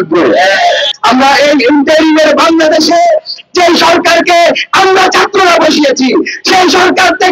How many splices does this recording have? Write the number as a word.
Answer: one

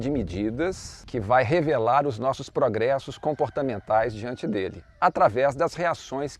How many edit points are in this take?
one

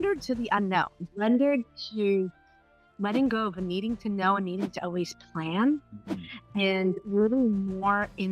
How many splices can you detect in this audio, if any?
one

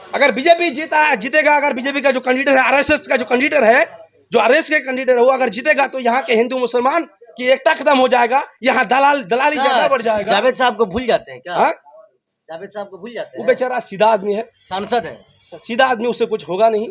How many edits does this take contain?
zero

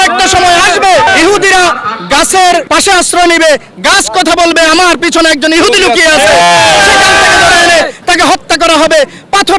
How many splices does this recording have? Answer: two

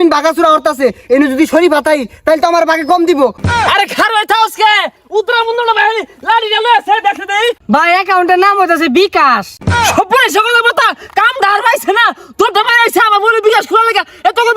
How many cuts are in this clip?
three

